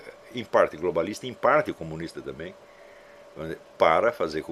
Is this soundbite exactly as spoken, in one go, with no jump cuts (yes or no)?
yes